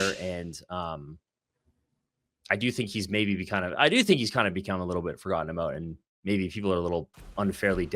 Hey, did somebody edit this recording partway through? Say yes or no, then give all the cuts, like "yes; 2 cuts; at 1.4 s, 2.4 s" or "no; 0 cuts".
no; 0 cuts